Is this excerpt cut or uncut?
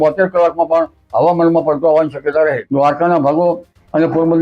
cut